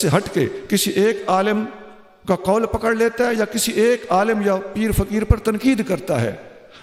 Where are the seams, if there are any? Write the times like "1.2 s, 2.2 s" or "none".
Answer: none